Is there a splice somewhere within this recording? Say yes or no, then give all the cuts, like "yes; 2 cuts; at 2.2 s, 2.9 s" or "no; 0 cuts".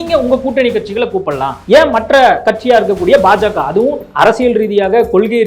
yes; 3 cuts; at 1.5 s, 2.5 s, 4.0 s